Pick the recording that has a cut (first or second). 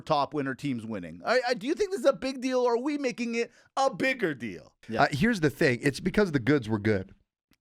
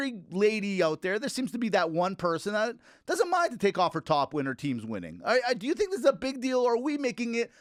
first